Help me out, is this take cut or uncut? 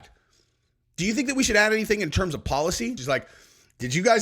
cut